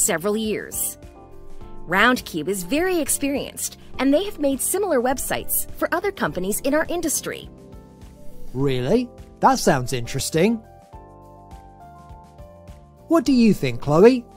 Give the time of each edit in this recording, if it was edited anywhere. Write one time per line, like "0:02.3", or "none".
0:10.6
0:13.0